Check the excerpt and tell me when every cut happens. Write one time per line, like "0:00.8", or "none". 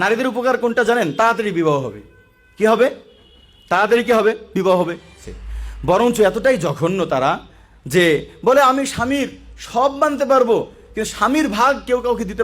0:05.2